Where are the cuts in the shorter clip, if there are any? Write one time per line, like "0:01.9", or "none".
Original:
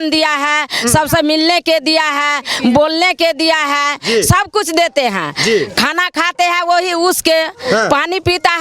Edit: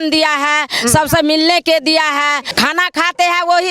0:02.5